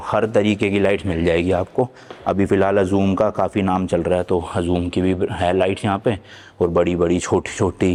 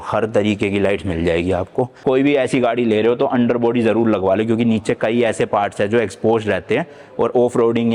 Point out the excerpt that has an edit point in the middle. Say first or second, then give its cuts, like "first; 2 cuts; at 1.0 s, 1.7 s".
second; 1 cut; at 1.9 s